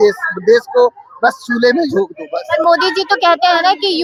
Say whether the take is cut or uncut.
uncut